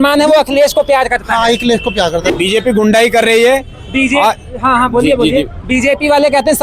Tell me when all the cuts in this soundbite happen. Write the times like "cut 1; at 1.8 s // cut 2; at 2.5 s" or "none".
cut 1; at 2.3 s